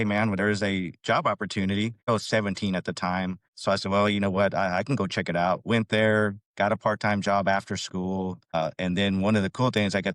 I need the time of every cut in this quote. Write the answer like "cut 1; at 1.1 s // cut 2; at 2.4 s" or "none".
cut 1; at 2.1 s